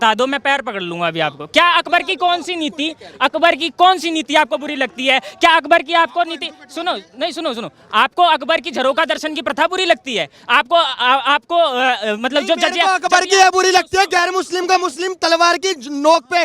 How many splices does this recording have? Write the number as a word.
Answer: zero